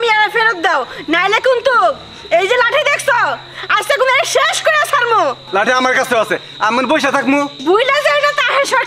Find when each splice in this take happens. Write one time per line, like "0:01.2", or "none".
0:05.4
0:07.6